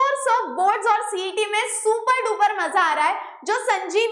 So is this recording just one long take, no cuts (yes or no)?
yes